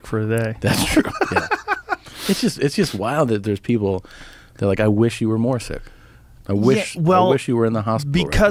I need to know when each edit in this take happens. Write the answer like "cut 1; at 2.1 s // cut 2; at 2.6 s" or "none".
none